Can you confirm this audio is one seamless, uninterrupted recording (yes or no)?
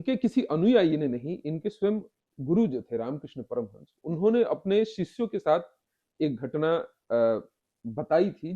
yes